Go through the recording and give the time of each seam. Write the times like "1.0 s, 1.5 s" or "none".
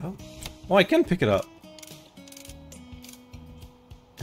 none